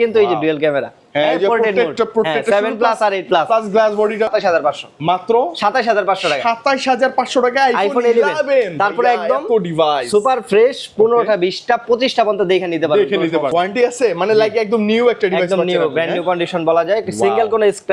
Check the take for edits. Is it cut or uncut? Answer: cut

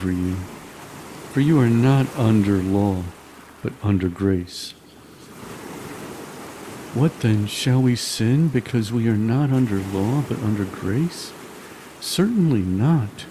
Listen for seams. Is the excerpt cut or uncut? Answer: cut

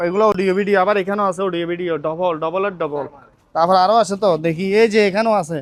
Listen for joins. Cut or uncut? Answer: uncut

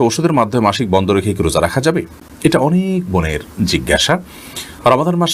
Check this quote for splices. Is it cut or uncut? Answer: uncut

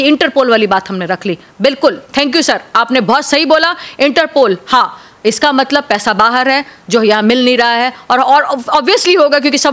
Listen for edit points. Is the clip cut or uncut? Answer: uncut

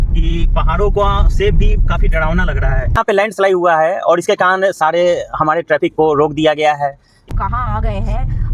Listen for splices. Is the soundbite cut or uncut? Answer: cut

